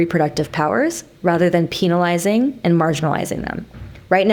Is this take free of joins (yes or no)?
yes